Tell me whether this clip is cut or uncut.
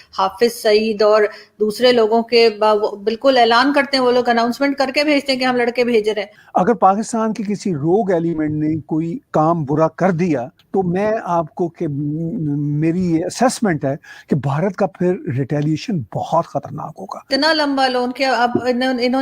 cut